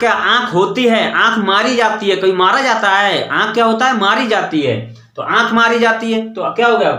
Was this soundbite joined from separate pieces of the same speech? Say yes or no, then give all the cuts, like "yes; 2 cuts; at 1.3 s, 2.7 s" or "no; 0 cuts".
no; 0 cuts